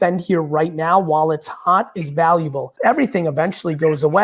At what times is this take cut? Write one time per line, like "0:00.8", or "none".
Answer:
0:02.7